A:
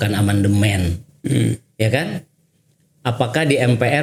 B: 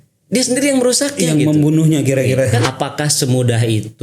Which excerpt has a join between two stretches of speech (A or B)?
B